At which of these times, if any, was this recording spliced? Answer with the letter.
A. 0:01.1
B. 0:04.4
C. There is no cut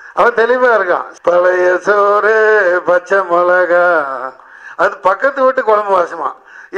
A